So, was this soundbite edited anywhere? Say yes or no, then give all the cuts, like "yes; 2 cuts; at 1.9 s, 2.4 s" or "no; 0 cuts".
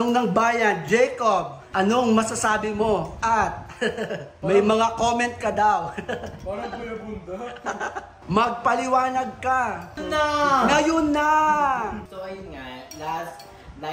yes; 6 cuts; at 1.6 s, 3.1 s, 4.3 s, 8.1 s, 10.0 s, 12.1 s